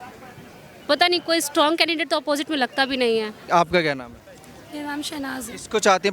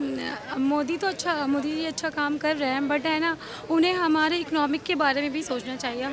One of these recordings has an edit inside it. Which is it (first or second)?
first